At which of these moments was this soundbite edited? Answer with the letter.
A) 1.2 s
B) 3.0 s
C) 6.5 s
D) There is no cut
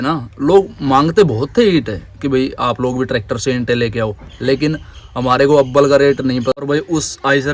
C